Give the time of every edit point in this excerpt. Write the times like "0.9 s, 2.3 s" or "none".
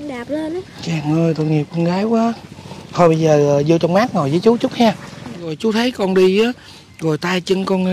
5.5 s